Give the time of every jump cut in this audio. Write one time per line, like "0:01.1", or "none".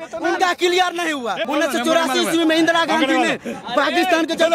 0:01.4

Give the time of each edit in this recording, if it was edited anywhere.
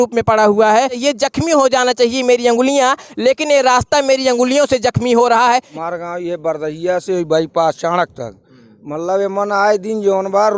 0:01.0
0:05.7

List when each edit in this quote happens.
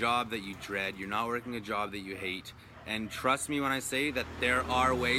none

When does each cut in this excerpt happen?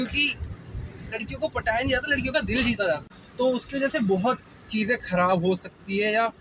0:03.2

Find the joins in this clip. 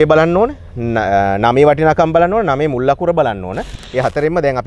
0:03.7

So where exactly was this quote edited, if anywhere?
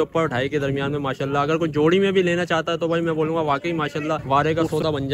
0:04.2

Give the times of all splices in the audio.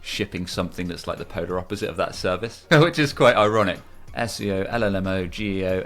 0:02.5
0:03.8

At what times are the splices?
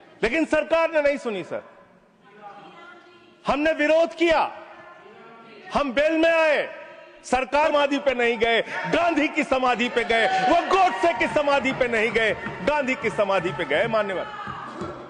0:07.7

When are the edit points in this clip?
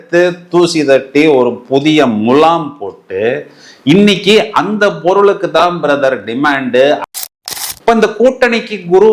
0:07.2

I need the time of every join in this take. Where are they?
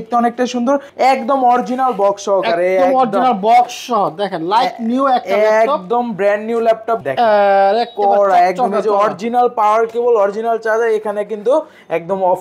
0:00.9
0:07.0

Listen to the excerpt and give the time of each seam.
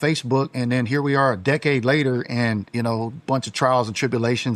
none

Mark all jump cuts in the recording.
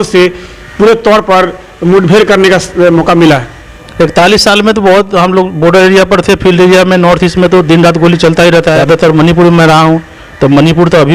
0:08.8

